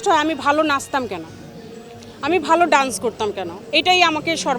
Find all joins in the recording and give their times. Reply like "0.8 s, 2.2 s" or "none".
none